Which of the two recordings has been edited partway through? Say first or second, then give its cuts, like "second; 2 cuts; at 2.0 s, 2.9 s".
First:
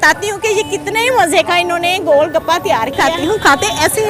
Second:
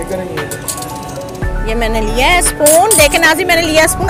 first; 1 cut; at 3.0 s